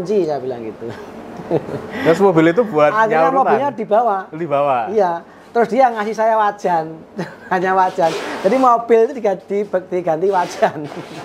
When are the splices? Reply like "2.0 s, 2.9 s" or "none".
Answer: none